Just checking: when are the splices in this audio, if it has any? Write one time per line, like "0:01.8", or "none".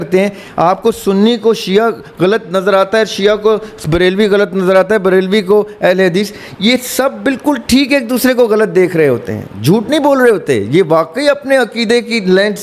none